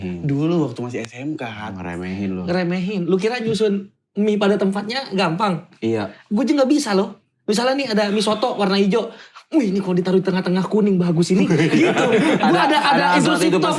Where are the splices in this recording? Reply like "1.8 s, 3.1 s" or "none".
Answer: none